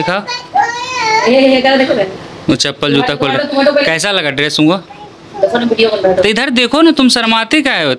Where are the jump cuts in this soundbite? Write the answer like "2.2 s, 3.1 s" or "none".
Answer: none